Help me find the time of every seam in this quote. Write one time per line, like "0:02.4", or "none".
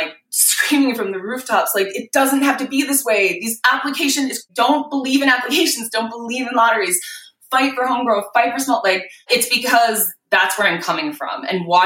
0:09.1